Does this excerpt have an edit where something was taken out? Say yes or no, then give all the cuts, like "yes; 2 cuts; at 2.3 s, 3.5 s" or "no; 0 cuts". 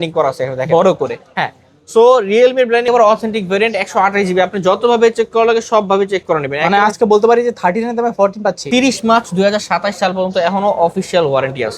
yes; 2 cuts; at 2.9 s, 8.6 s